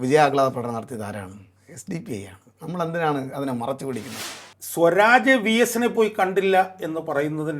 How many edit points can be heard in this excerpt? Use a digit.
1